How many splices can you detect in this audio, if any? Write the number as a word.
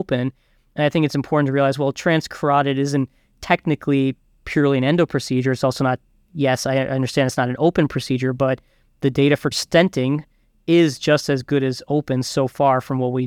one